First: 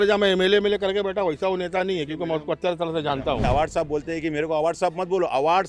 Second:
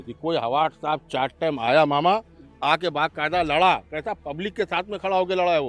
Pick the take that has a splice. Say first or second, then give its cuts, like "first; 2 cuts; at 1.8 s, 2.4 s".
first; 1 cut; at 3.4 s